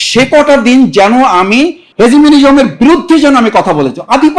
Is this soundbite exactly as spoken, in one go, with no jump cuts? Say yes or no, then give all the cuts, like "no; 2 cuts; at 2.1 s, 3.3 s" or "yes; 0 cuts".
no; 1 cut; at 1.8 s